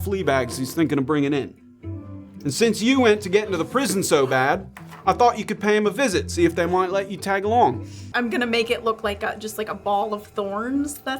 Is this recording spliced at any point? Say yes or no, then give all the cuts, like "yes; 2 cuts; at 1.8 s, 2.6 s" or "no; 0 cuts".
yes; 1 cut; at 8.1 s